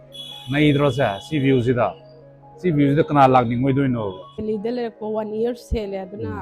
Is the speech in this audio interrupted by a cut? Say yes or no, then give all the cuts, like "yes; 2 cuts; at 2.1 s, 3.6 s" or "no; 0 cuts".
yes; 1 cut; at 4.4 s